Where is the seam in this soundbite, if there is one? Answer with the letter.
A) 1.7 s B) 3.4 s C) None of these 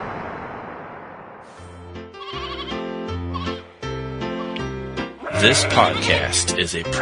A